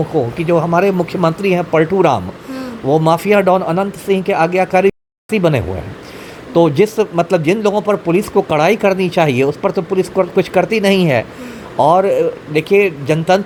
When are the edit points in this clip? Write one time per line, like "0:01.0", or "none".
none